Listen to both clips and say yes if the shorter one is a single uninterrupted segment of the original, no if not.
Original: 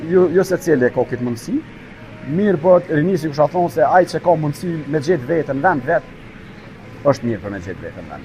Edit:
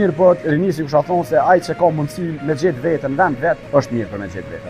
no